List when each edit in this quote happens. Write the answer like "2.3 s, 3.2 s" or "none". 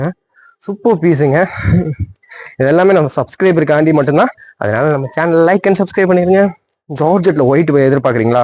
none